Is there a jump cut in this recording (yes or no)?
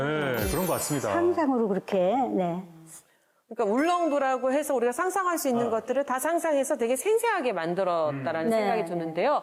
no